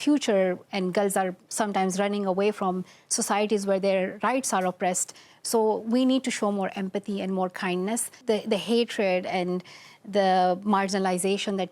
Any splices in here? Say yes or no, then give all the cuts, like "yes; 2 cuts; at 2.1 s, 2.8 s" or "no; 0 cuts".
yes; 1 cut; at 8.1 s